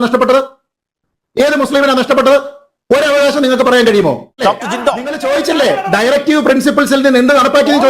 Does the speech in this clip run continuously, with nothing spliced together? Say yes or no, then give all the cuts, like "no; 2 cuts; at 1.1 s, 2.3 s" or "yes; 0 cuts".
no; 1 cut; at 4.4 s